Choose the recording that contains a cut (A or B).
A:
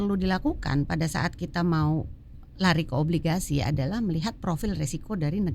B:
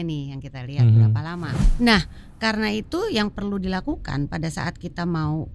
B